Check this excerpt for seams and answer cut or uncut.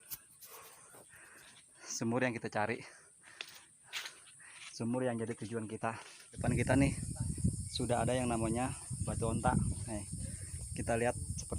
cut